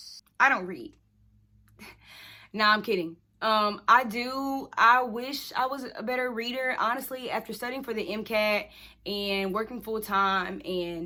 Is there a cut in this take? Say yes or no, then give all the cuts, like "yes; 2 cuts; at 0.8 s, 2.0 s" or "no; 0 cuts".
no; 0 cuts